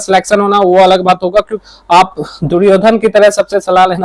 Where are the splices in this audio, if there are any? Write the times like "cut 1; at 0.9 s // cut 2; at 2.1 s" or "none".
cut 1; at 1.6 s

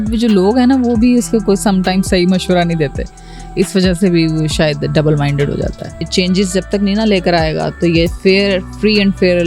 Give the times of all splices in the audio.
cut 1; at 6.0 s

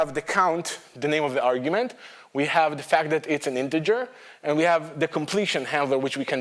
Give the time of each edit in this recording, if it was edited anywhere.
none

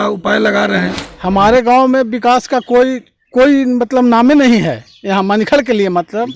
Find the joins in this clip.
cut 1; at 1.0 s

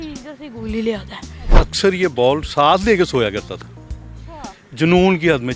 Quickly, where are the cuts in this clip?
cut 1; at 1.5 s

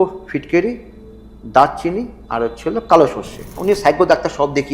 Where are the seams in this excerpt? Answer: cut 1; at 3.6 s

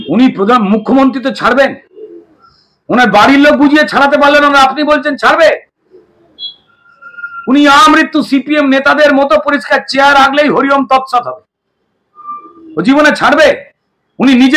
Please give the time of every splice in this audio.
none

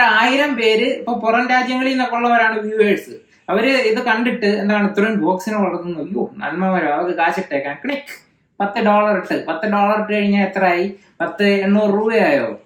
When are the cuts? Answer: none

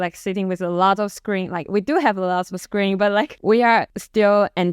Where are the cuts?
cut 1; at 3.5 s

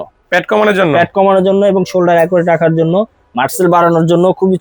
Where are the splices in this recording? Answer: none

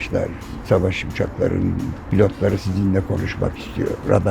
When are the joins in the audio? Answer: none

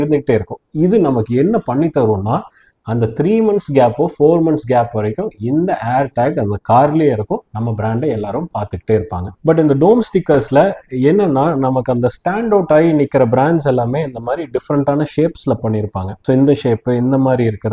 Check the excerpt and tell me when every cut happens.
cut 1; at 9.3 s

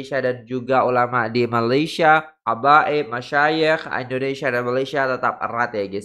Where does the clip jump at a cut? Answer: none

